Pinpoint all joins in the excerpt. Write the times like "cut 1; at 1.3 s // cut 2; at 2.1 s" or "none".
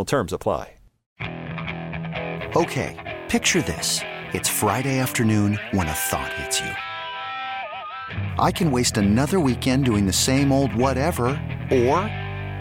cut 1; at 1.0 s